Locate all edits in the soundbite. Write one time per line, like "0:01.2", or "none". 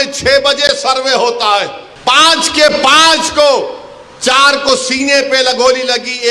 0:01.8